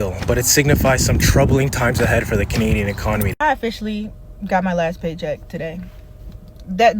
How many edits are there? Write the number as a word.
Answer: one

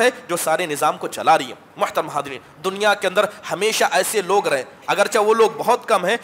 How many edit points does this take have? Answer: zero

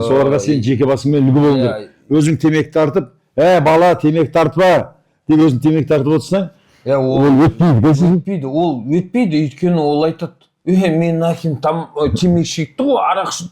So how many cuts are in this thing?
zero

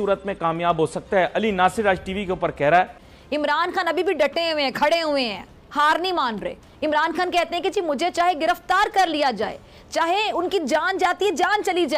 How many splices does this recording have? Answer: one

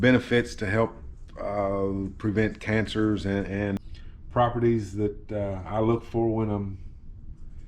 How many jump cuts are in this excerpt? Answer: one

